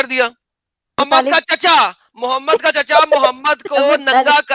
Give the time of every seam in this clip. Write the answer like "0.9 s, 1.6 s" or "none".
1.0 s